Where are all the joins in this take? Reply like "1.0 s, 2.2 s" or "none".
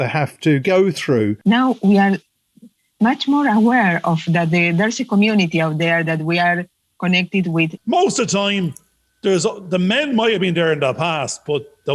1.4 s, 7.8 s